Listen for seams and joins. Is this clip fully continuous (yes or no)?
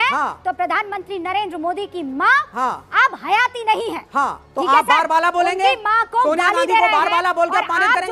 yes